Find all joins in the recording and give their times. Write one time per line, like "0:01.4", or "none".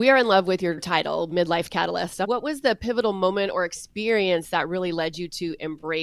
0:00.8
0:02.3